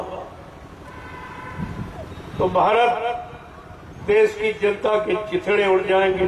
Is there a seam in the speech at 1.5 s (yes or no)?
no